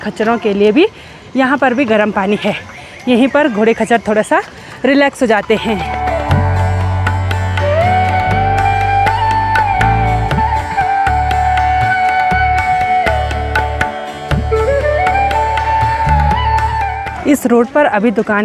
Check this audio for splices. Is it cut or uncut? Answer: uncut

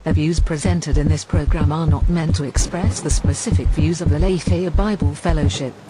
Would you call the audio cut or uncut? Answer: uncut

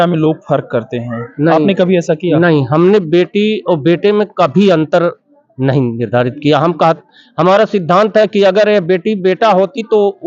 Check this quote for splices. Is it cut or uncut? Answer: uncut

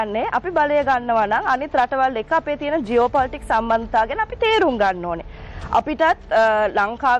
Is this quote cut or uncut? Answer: uncut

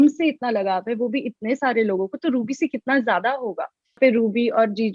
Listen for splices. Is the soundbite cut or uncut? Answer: cut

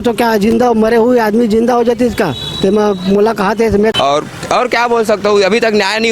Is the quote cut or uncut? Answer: cut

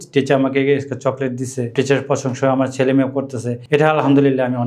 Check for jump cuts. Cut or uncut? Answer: cut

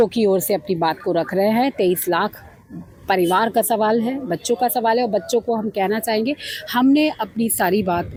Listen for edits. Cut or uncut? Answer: uncut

